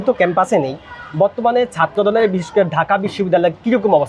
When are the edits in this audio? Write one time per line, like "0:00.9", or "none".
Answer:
none